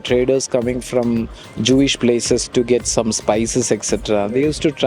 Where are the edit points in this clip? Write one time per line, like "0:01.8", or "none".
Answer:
none